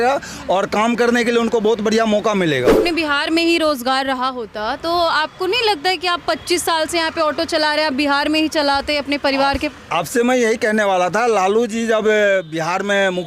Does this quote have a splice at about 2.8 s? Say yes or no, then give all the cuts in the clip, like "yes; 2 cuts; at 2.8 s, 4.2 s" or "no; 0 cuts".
yes; 1 cut; at 2.8 s